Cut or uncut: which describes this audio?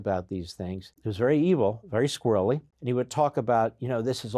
cut